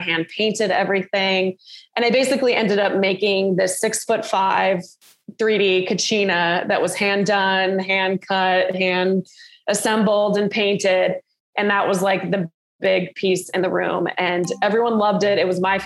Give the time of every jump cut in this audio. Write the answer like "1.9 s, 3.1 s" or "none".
none